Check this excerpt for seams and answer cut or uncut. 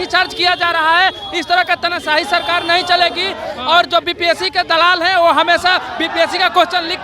uncut